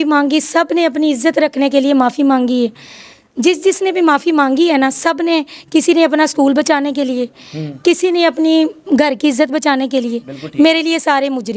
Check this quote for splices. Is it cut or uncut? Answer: uncut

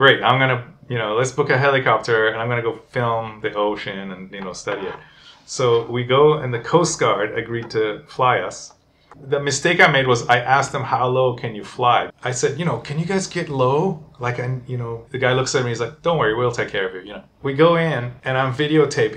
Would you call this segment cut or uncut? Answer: cut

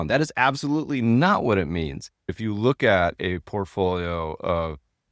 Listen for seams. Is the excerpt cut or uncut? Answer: cut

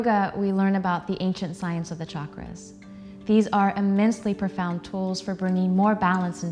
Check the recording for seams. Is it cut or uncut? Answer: uncut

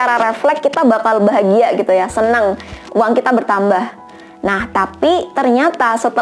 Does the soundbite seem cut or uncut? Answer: uncut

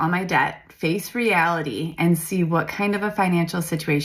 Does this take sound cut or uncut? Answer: uncut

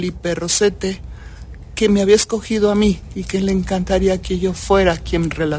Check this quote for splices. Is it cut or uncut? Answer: uncut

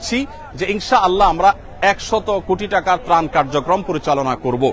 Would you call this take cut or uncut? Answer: uncut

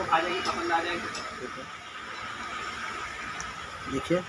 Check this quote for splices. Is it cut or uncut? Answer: cut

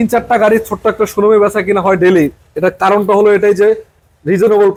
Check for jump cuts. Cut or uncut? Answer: uncut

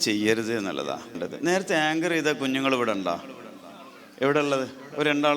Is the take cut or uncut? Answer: cut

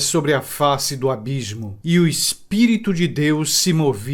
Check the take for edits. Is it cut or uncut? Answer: uncut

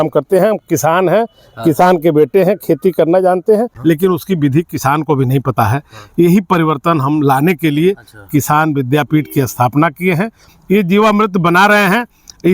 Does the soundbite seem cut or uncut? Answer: cut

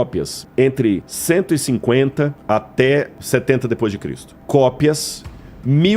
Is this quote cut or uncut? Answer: cut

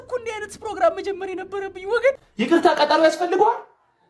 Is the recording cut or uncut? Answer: cut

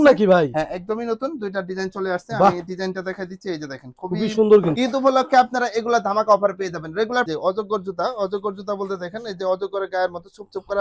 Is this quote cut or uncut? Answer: cut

